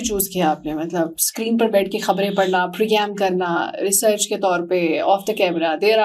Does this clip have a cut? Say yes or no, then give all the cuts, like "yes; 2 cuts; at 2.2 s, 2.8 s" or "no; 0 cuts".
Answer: no; 0 cuts